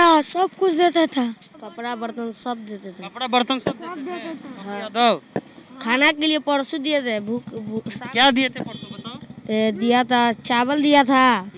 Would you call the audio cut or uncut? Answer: cut